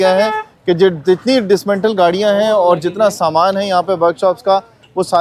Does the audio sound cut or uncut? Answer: uncut